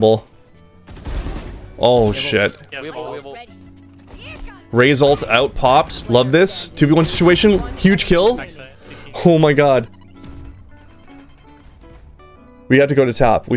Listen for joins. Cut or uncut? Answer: uncut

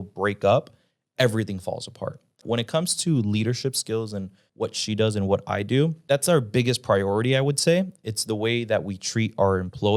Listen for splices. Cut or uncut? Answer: cut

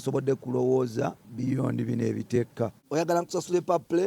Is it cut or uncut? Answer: cut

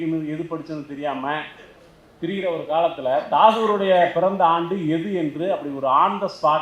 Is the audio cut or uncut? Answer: uncut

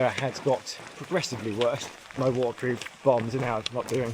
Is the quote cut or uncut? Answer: cut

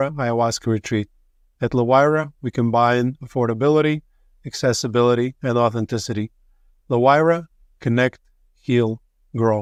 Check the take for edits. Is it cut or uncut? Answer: uncut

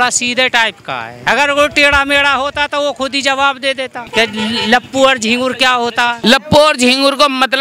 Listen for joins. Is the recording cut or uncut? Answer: cut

